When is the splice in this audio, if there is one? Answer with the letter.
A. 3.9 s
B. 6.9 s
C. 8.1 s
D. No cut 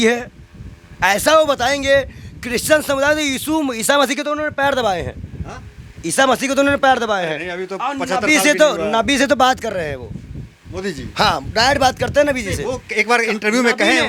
D